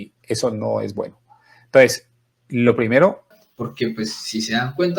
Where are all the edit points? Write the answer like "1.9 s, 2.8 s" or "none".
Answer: 3.5 s